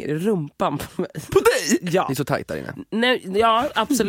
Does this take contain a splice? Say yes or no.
yes